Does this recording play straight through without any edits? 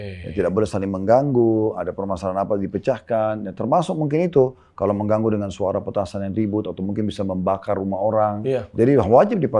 no; 1 cut; at 8.7 s

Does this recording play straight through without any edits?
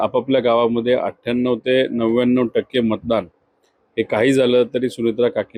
yes; 0 cuts

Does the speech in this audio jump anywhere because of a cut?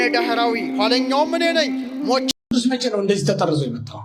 yes; 1 cut; at 2.3 s

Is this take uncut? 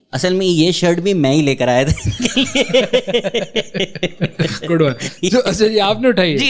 yes; 0 cuts

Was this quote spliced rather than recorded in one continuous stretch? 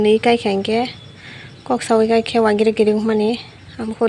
no; 0 cuts

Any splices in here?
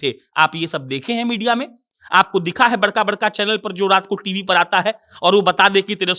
no; 0 cuts

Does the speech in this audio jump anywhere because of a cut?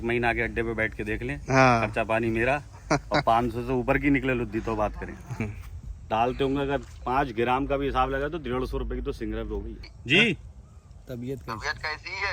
yes; 2 cuts; at 5.4 s, 9.7 s

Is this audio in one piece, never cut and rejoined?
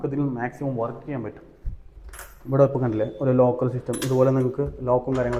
yes; 0 cuts

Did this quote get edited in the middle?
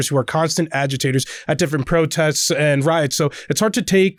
no; 0 cuts

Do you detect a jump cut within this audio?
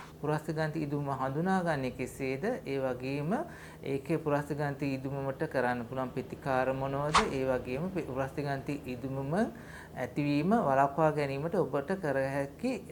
no; 0 cuts

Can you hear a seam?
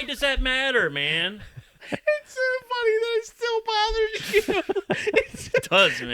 yes; 1 cut; at 1.7 s

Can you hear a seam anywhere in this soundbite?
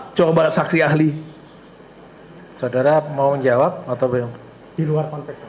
no; 0 cuts

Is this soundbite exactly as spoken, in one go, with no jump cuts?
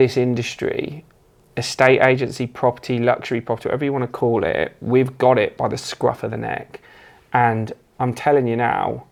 yes; 0 cuts

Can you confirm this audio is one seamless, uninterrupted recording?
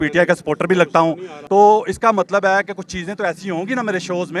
no; 1 cut; at 1.3 s

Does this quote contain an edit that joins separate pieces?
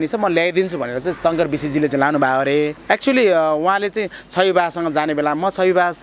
yes; 1 cut; at 2.8 s

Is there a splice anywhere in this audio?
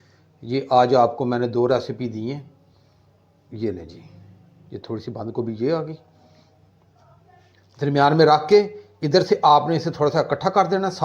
yes; 1 cut; at 7.5 s

